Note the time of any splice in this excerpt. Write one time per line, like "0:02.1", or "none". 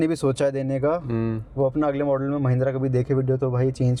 none

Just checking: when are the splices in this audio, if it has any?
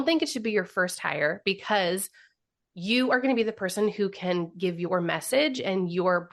none

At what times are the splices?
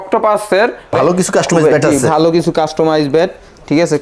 0:00.9

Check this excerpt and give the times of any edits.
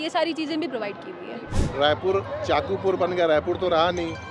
0:01.5

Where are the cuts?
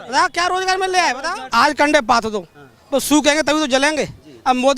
0:01.4

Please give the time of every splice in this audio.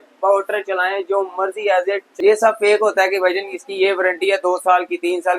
0:02.1

